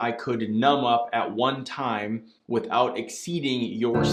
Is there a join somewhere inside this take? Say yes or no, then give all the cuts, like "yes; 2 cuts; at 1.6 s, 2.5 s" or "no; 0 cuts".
no; 0 cuts